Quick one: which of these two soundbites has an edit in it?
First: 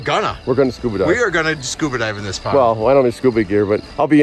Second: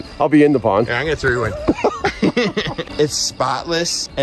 second; 1 cut; at 2.8 s

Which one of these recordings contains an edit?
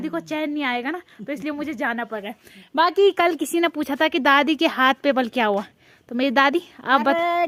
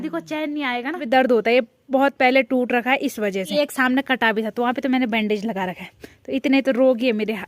second; 2 cuts; at 1.0 s, 3.5 s

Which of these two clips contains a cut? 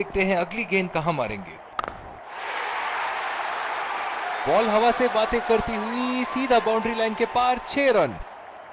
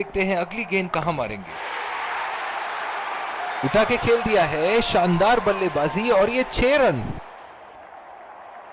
second; 2 cuts; at 1.5 s, 7.8 s

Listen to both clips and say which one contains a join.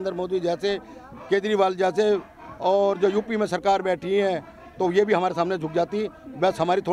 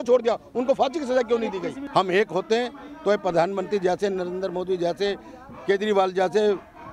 second; 1 cut; at 1.8 s

